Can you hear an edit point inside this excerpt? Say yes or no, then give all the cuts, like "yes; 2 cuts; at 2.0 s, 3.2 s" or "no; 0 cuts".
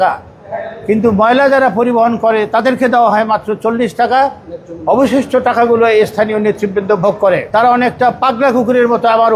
yes; 1 cut; at 7.5 s